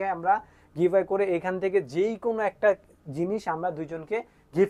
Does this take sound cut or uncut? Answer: uncut